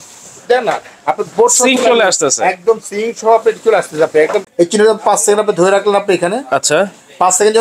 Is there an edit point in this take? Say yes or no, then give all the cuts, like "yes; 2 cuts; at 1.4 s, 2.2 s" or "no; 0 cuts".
yes; 1 cut; at 4.5 s